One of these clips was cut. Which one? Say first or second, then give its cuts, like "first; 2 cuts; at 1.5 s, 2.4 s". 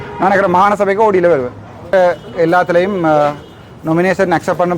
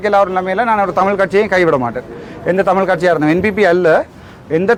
first; 1 cut; at 1.9 s